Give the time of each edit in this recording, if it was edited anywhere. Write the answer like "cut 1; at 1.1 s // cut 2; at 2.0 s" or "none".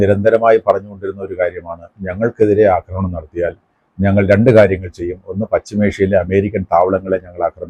none

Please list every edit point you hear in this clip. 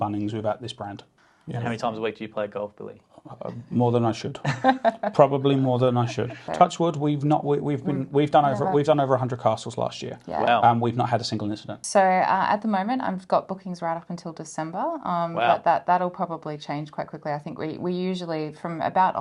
cut 1; at 1.1 s // cut 2; at 6.4 s // cut 3; at 11.7 s

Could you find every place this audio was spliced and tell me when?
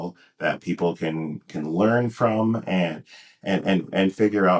none

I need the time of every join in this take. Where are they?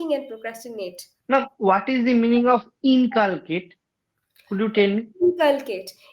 cut 1; at 1.1 s

